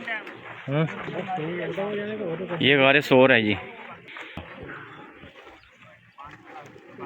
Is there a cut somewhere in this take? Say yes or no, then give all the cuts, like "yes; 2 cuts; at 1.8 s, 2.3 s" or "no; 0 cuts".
yes; 1 cut; at 4.3 s